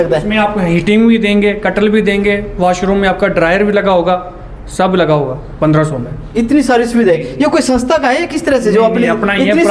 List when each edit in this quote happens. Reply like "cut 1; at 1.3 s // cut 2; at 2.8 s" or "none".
none